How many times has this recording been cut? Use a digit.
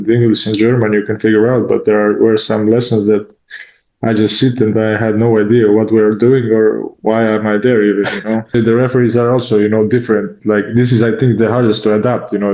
1